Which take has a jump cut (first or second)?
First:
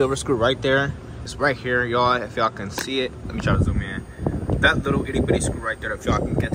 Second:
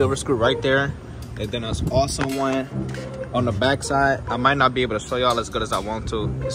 first